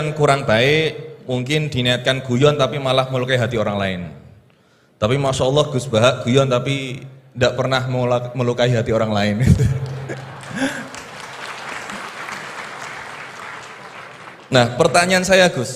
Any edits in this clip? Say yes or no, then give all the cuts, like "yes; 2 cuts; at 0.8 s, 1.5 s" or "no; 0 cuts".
no; 0 cuts